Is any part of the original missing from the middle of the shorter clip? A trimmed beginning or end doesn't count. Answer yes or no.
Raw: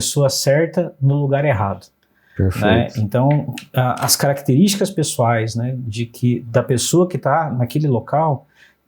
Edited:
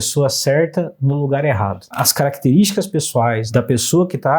yes